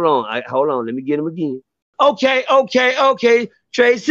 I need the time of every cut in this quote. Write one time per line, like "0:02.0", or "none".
0:01.9